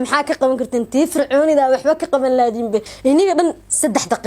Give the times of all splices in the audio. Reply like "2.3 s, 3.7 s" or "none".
2.9 s

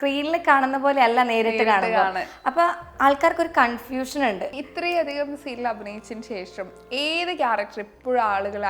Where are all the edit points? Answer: 4.5 s

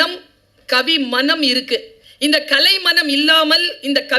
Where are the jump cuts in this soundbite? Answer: 2.0 s

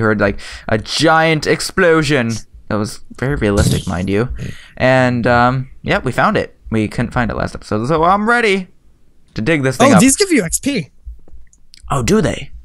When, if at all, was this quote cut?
4.0 s

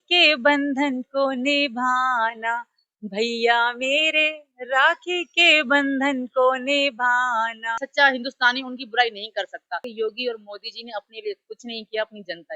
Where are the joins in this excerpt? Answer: 7.8 s, 9.9 s

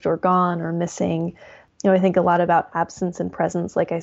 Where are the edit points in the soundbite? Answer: none

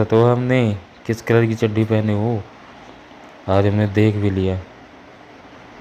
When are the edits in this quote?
none

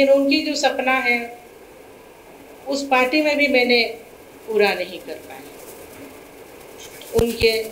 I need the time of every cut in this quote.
none

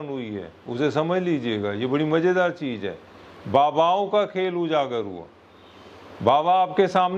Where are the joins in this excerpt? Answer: none

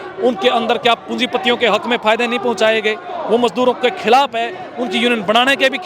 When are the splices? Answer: none

